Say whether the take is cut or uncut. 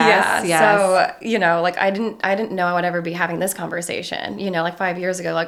uncut